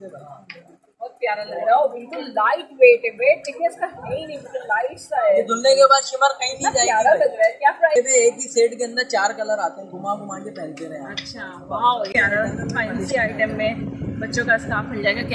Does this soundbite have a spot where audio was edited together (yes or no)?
yes